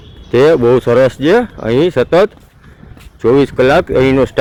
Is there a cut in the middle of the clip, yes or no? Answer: no